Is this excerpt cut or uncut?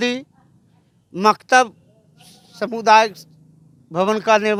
uncut